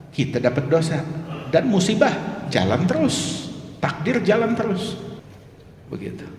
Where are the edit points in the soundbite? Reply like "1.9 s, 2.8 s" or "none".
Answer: 5.1 s